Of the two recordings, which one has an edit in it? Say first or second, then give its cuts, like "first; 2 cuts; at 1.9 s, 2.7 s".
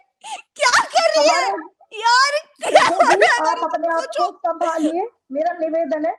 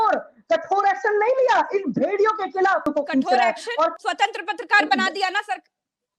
second; 2 cuts; at 2.9 s, 4.0 s